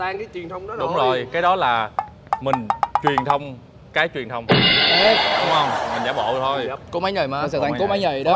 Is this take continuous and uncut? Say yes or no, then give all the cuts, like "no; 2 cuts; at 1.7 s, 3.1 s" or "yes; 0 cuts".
no; 1 cut; at 6.8 s